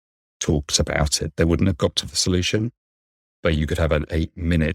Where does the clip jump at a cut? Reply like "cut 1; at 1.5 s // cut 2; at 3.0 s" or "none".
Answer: cut 1; at 1.2 s

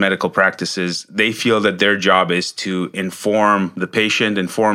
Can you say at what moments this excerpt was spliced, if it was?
none

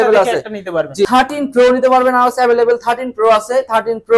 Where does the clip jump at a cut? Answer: cut 1; at 1.1 s

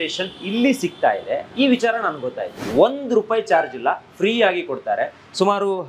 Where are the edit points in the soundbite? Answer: cut 1; at 2.6 s

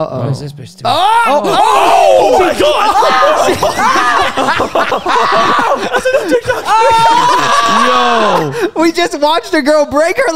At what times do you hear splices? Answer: none

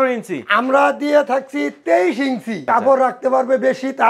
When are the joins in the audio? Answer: cut 1; at 2.6 s

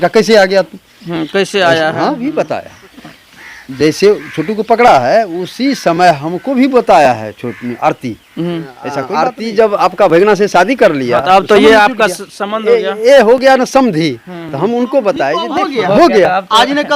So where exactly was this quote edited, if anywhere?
cut 1; at 2.2 s // cut 2; at 9.0 s // cut 3; at 15.5 s

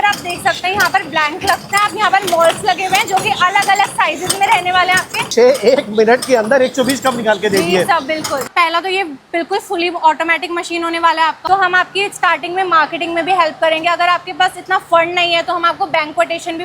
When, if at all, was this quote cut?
cut 1; at 1.7 s // cut 2; at 5.3 s // cut 3; at 8.5 s // cut 4; at 11.4 s

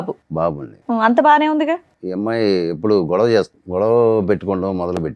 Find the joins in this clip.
cut 1; at 2.0 s // cut 2; at 3.6 s

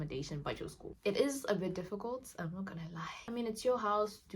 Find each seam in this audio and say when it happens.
cut 1; at 0.9 s // cut 2; at 3.3 s

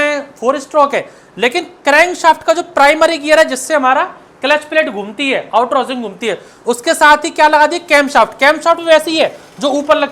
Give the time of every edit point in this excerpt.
none

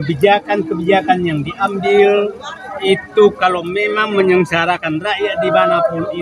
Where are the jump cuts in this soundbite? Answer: none

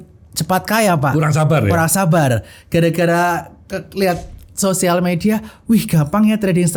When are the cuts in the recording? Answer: none

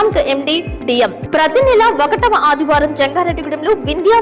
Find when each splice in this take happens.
cut 1; at 1.2 s

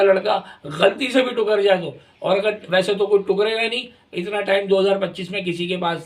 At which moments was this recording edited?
none

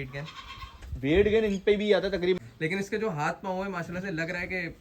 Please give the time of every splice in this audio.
cut 1; at 2.4 s

